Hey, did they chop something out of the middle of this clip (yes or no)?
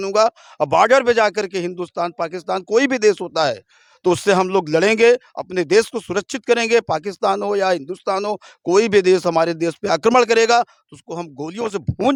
no